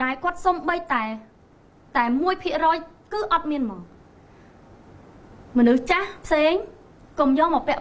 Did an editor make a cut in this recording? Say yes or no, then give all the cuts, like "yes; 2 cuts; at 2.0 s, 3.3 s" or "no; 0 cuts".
no; 0 cuts